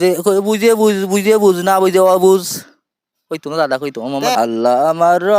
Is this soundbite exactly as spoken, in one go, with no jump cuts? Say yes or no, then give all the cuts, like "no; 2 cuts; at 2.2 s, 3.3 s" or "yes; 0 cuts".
no; 1 cut; at 4.3 s